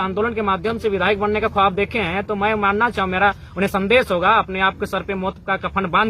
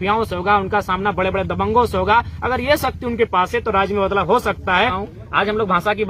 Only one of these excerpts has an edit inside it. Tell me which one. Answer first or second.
second